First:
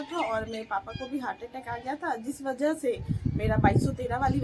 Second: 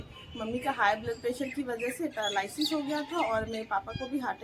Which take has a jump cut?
second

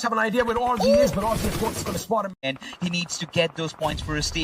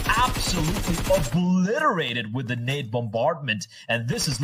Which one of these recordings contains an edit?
first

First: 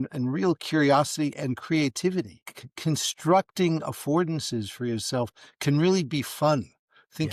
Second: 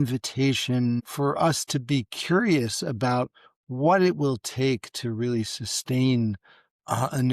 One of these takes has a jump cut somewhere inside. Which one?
second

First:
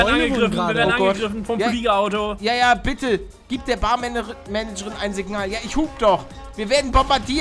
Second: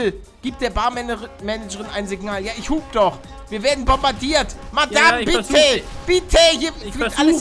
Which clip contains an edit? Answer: second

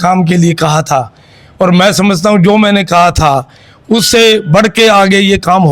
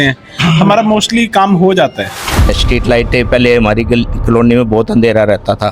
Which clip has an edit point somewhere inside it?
second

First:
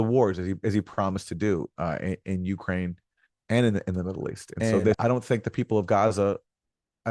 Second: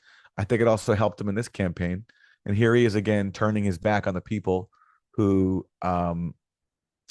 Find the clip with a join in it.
first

